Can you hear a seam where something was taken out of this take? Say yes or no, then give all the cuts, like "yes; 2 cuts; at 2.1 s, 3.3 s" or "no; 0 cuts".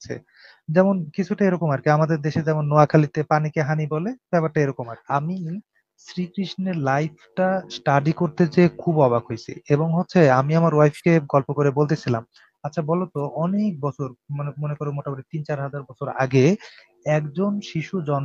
yes; 1 cut; at 5.0 s